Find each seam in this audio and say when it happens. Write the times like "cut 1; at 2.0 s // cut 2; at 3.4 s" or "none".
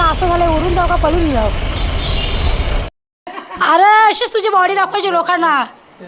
cut 1; at 2.9 s